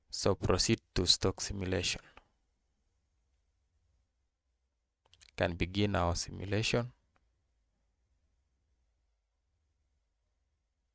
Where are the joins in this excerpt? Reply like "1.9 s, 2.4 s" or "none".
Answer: none